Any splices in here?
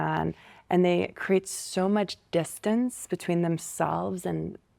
no; 0 cuts

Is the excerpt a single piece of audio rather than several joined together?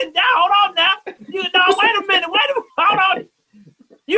no; 1 cut; at 2.7 s

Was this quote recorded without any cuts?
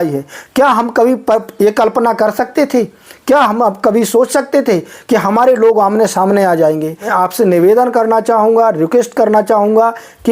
no; 1 cut; at 7.1 s

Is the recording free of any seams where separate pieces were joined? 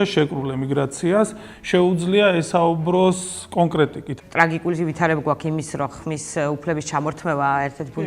no; 1 cut; at 4.0 s

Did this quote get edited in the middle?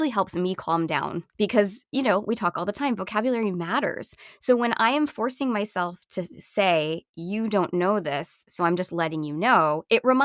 yes; 1 cut; at 1.2 s

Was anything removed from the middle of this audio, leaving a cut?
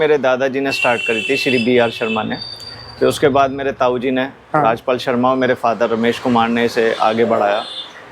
no; 0 cuts

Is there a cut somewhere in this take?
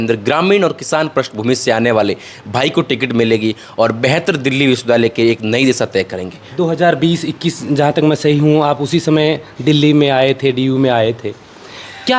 no; 0 cuts

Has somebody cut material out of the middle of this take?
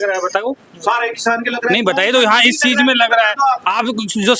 no; 0 cuts

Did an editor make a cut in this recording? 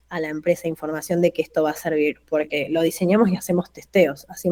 no; 0 cuts

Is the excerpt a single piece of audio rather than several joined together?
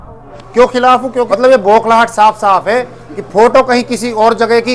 no; 1 cut; at 1.3 s

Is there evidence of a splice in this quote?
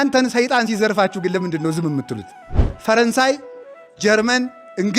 yes; 1 cut; at 2.6 s

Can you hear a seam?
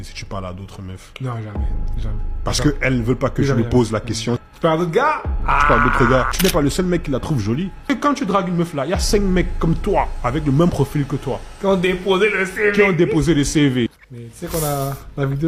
no; 0 cuts

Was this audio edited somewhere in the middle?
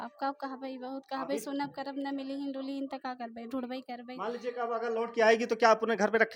no; 0 cuts

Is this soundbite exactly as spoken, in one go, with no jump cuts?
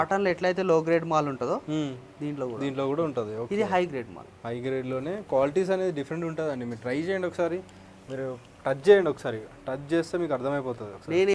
yes; 0 cuts

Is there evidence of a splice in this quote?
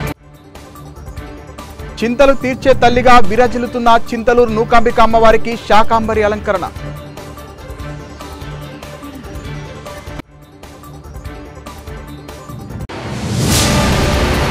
no; 0 cuts

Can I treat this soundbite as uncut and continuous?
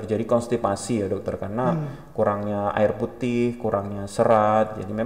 yes; 0 cuts

